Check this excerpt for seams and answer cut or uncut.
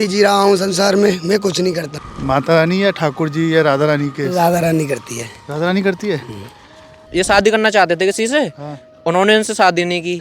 cut